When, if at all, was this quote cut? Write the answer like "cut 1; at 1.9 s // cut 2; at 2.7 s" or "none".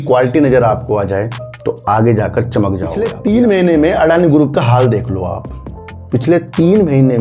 cut 1; at 3.1 s

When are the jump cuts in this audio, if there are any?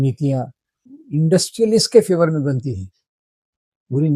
cut 1; at 0.9 s

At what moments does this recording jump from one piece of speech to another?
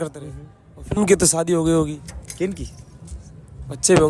cut 1; at 1.0 s

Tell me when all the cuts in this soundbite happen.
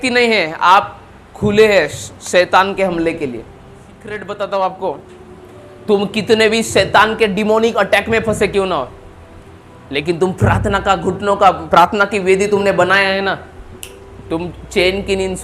cut 1; at 4.2 s

